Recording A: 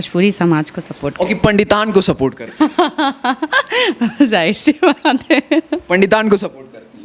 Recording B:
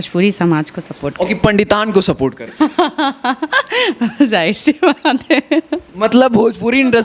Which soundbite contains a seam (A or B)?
B